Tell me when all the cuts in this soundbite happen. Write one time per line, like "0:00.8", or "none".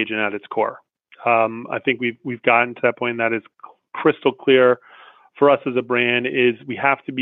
none

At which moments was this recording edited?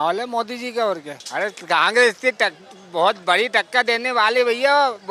0:01.2

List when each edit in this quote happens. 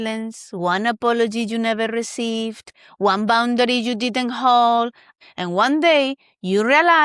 0:05.1

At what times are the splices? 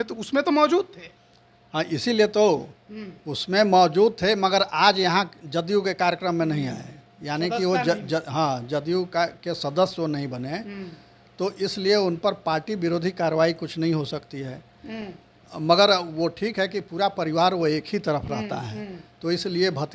none

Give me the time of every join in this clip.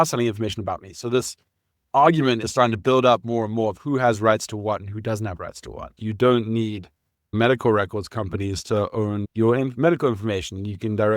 0:05.9
0:07.3
0:09.2

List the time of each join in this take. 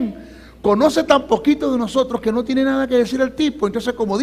0:02.2

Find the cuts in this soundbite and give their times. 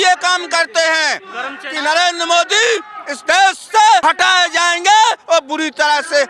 0:01.6
0:04.0

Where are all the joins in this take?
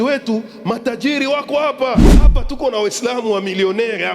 0:02.2

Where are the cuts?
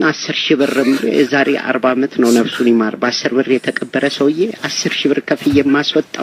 none

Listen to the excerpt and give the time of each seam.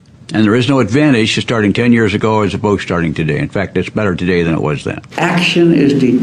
0:05.0

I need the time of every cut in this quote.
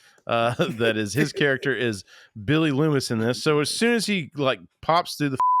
none

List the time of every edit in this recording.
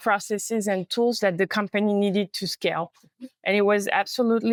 none

